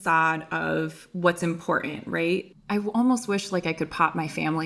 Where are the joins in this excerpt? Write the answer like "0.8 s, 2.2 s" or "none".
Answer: 2.5 s